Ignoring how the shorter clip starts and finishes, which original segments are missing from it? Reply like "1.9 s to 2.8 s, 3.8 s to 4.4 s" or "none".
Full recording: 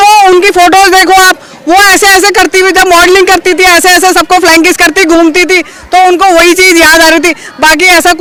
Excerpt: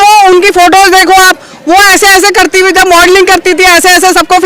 none